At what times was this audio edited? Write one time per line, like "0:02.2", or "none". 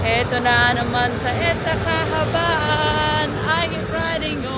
none